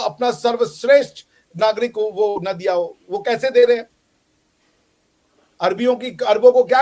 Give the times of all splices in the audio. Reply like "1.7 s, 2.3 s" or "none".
none